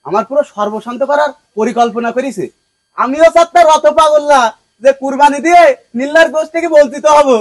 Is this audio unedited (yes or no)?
yes